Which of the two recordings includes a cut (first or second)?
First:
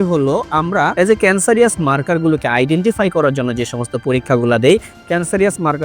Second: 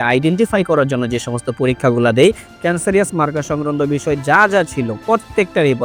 first